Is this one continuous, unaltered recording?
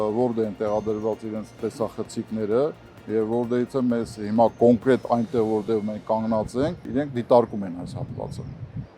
no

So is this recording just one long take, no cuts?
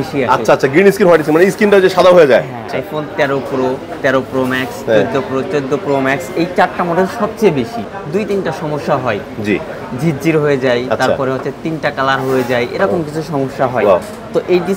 no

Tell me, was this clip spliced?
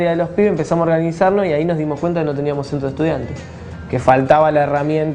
yes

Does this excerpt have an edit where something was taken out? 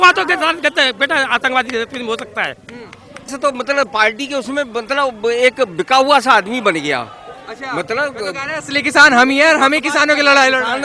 yes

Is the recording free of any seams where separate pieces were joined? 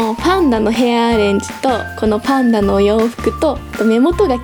yes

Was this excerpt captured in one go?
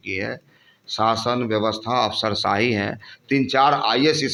yes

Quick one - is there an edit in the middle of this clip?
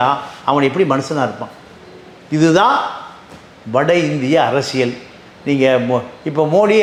no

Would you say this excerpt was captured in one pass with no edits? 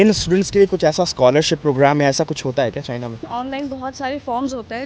no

